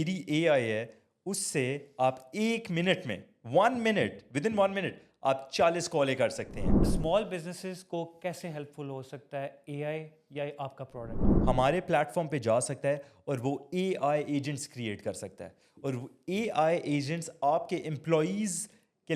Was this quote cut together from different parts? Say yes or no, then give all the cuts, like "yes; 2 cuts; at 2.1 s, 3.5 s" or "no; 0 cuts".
yes; 2 cuts; at 6.8 s, 11.2 s